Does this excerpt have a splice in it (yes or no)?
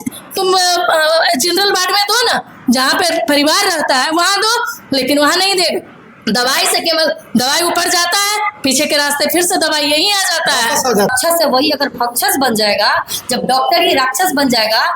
yes